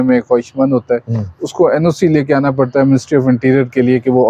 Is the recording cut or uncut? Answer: uncut